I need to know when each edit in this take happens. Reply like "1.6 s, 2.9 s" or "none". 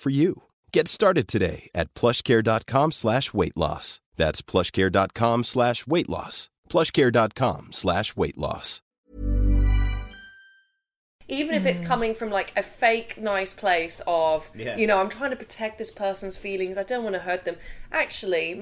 11.1 s